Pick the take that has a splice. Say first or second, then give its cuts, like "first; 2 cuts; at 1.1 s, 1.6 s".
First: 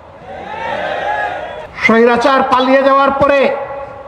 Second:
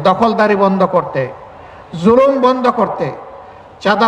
first; 1 cut; at 1.7 s